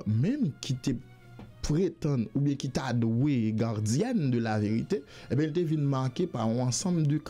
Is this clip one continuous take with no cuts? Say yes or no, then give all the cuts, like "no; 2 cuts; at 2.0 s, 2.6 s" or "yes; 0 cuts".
yes; 0 cuts